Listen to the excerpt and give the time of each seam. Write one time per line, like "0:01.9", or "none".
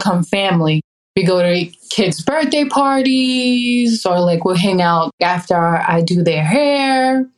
0:01.0